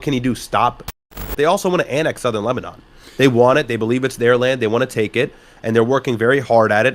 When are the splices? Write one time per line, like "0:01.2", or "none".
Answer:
0:01.2